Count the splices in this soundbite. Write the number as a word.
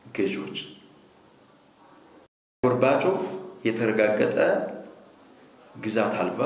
one